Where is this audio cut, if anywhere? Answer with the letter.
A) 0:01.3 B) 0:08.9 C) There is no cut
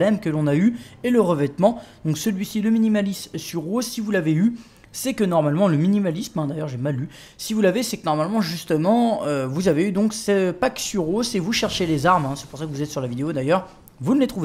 A